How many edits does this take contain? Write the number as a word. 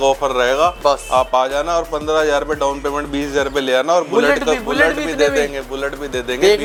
zero